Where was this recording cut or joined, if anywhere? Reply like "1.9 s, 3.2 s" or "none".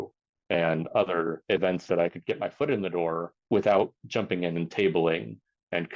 1.4 s, 3.3 s, 4.0 s